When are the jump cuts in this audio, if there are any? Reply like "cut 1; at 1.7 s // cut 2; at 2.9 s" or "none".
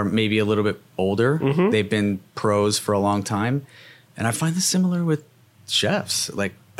cut 1; at 1.4 s // cut 2; at 2.3 s